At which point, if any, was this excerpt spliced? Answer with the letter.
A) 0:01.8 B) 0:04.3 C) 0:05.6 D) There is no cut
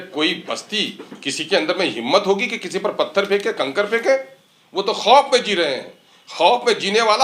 D